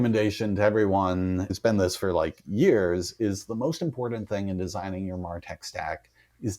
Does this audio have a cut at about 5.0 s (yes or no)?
no